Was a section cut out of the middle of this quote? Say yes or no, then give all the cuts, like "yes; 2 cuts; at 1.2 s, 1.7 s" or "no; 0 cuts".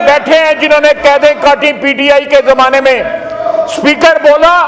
no; 0 cuts